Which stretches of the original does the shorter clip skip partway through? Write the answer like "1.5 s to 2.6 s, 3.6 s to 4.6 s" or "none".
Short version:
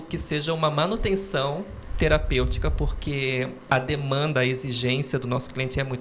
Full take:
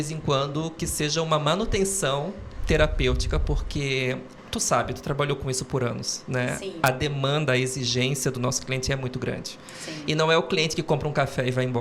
4.3 s to 6.7 s